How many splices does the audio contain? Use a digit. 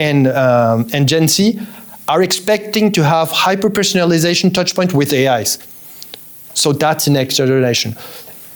0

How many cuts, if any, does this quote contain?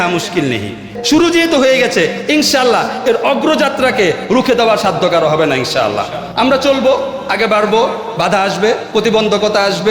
1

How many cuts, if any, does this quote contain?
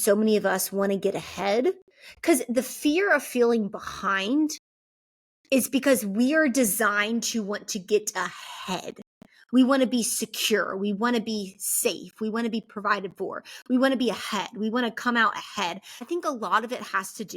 1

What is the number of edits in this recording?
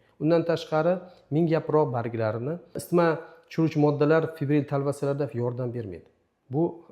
1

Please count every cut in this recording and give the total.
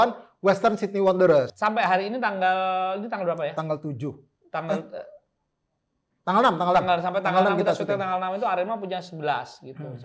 1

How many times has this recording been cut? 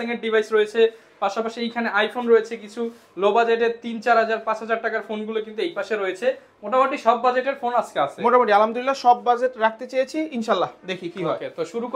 0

